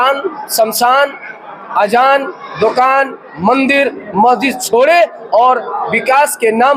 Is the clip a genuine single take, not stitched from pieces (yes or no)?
yes